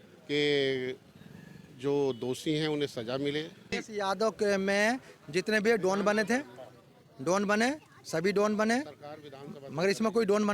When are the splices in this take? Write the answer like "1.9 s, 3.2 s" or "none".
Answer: 3.8 s